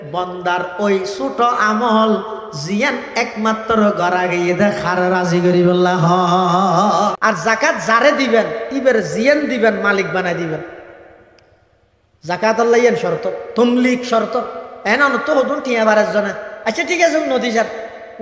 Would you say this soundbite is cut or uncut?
cut